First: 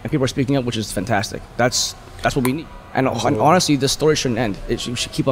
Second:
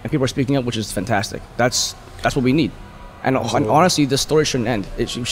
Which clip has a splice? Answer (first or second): first